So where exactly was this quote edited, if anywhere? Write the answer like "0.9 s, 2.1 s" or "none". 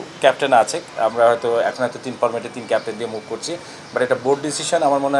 none